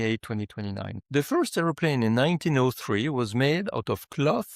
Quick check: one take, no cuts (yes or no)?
no